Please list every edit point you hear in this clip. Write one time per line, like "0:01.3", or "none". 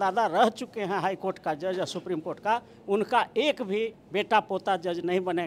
none